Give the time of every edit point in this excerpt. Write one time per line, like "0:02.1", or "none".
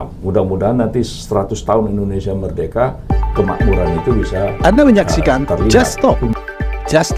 0:04.5

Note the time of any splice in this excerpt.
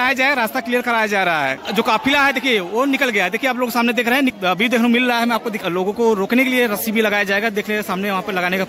0:01.6
0:04.3
0:05.6

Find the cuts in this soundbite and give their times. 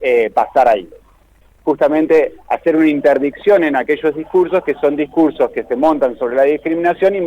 0:01.5

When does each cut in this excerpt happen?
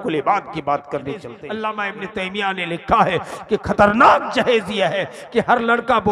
0:01.4

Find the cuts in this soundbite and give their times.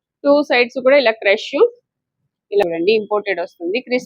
0:02.6

